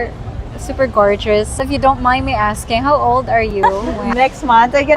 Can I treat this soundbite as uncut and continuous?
no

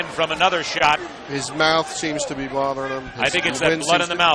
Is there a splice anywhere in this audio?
no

